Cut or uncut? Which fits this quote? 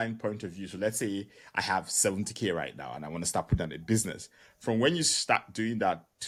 uncut